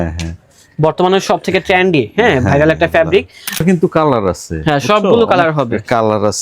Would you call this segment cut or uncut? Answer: cut